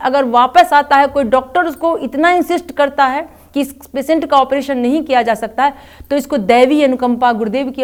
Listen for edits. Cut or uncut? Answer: uncut